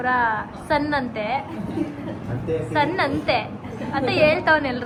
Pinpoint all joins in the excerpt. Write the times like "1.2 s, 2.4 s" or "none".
none